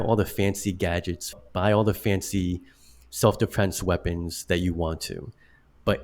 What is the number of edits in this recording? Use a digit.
1